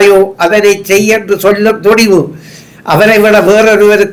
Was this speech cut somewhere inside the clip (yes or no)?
no